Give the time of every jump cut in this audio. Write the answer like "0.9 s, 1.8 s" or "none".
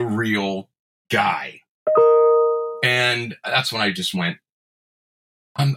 none